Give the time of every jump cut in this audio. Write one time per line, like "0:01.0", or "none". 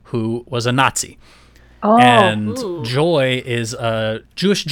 none

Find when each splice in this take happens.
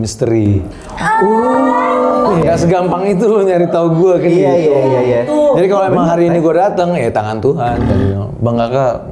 0:02.4
0:07.8

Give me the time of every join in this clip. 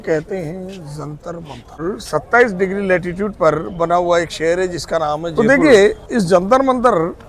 0:01.8
0:05.3

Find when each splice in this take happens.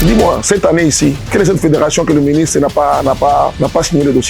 0:01.2
0:03.5

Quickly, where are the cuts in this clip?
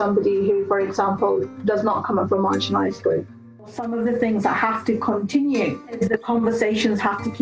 0:03.8
0:05.8

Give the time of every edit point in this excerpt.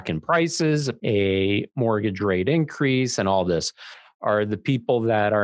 0:00.9

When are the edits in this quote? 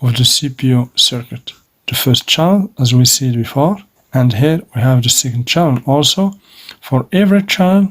0:01.6
0:03.9

